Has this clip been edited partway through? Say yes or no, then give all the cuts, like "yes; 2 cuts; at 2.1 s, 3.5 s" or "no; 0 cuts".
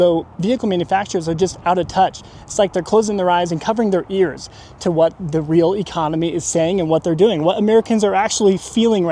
no; 0 cuts